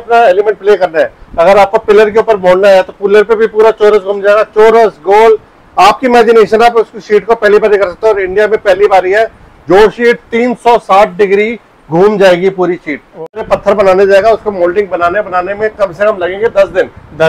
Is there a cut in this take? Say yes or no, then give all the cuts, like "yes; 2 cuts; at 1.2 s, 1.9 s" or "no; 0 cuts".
yes; 1 cut; at 13.4 s